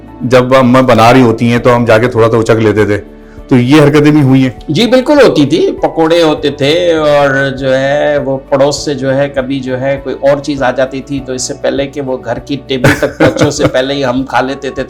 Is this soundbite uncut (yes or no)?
yes